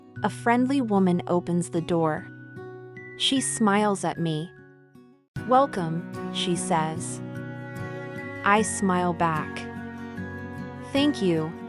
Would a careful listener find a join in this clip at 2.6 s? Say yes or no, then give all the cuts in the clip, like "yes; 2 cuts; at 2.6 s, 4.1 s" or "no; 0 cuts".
no; 0 cuts